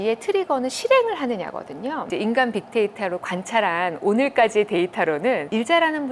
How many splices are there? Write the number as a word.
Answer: one